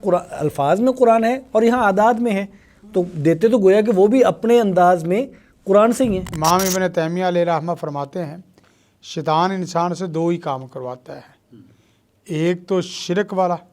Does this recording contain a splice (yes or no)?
yes